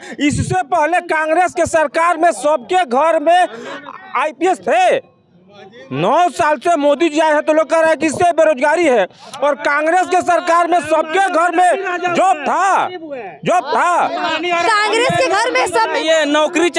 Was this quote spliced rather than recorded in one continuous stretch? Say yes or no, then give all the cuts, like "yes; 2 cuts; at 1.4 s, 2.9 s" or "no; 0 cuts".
no; 0 cuts